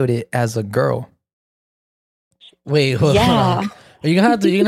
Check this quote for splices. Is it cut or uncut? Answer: uncut